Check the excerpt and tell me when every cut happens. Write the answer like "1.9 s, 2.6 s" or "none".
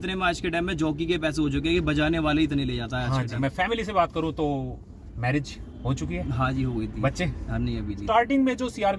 3.4 s, 8.0 s